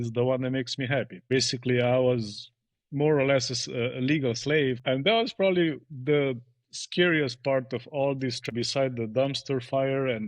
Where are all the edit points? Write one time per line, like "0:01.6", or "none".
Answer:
0:01.2
0:04.8
0:08.5